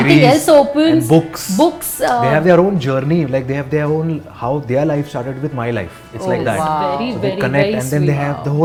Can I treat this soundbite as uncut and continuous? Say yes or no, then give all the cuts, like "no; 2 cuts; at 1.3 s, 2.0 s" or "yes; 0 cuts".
yes; 0 cuts